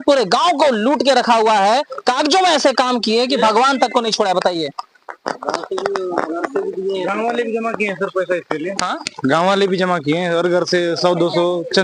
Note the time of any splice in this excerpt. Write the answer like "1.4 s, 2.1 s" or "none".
none

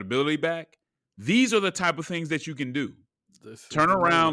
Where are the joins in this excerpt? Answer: none

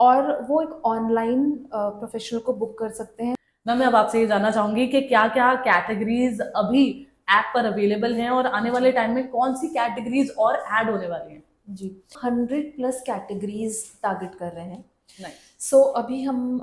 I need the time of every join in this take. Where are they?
3.4 s, 12.1 s

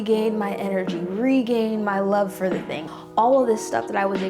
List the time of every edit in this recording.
2.8 s

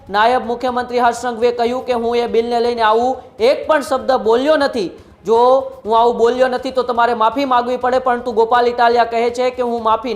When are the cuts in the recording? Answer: none

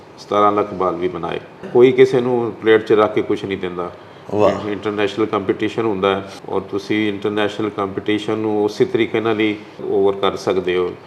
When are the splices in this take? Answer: 1.7 s, 6.4 s, 9.8 s

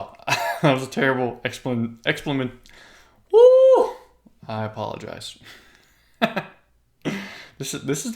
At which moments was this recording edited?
none

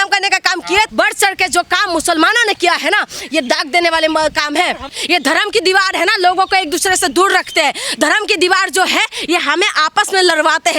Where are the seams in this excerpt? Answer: 0.9 s, 4.9 s

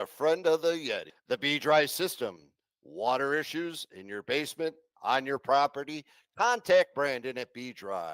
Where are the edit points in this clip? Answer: 7.1 s

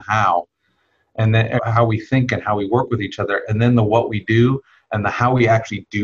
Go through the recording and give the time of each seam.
1.6 s

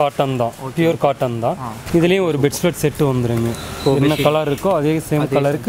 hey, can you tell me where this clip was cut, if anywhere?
1.7 s

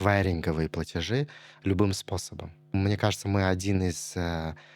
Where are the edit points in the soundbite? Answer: 2.7 s

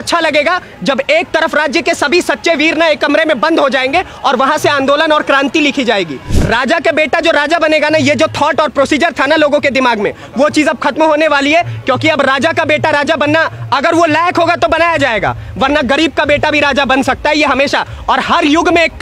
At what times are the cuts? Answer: 6.3 s

